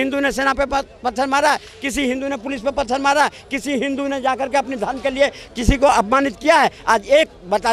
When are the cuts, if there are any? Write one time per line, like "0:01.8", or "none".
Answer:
none